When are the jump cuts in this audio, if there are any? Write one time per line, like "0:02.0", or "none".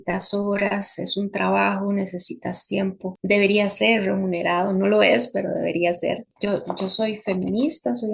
0:03.1
0:06.3